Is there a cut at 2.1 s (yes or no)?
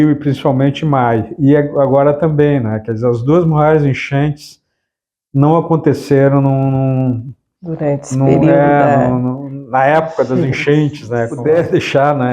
no